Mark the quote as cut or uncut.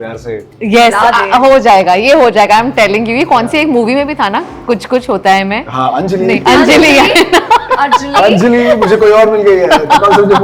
uncut